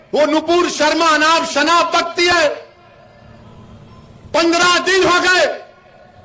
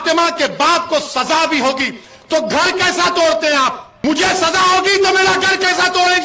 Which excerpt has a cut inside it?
second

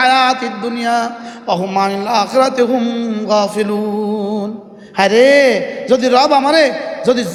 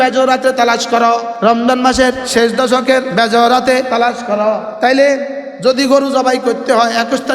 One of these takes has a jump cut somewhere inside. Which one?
second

